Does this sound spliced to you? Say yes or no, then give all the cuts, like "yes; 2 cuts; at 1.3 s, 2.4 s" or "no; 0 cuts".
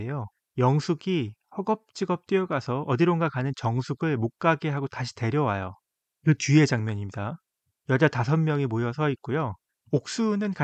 yes; 1 cut; at 9.7 s